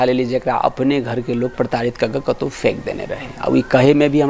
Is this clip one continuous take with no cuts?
yes; 0 cuts

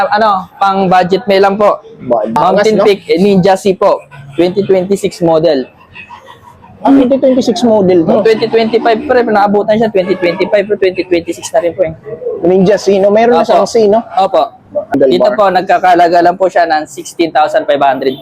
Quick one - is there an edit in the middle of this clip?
yes; 2 cuts; at 2.3 s, 14.9 s

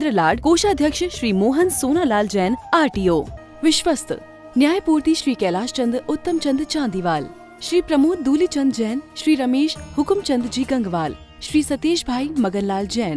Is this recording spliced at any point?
yes; 1 cut; at 3.4 s

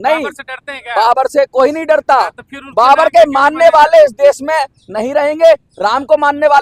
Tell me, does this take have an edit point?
no; 0 cuts

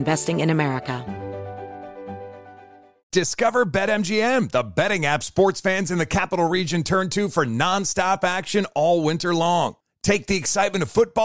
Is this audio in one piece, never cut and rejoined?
no; 1 cut; at 1.0 s

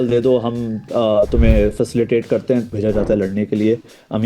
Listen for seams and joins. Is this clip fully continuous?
no; 1 cut; at 2.7 s

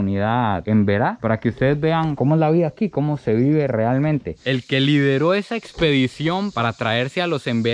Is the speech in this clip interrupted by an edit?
yes; 2 cuts; at 4.4 s, 6.5 s

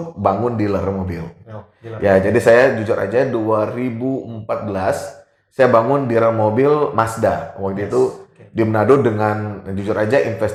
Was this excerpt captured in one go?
yes; 0 cuts

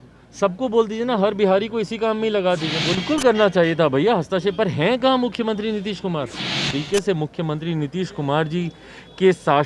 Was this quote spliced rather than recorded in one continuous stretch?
yes; 2 cuts; at 2.9 s, 6.7 s

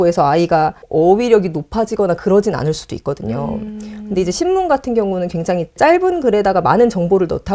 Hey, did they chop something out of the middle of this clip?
no; 0 cuts

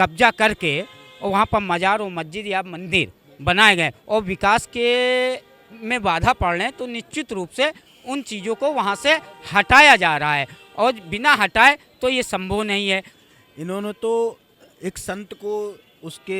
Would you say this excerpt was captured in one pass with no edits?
no; 1 cut; at 13.1 s

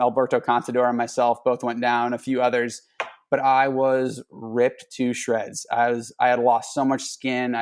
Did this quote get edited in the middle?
no; 0 cuts

